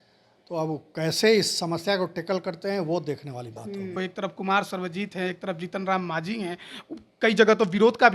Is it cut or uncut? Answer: cut